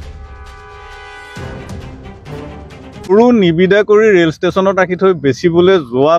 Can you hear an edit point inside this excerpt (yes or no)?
yes